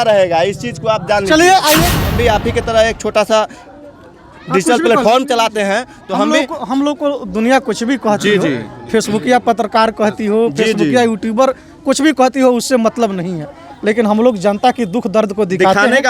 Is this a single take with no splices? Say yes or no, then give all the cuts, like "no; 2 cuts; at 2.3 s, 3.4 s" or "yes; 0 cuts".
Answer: no; 1 cut; at 2.0 s